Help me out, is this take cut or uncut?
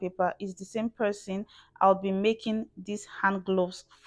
uncut